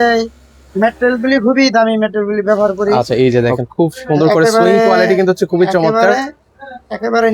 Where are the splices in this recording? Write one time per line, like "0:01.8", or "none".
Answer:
0:03.0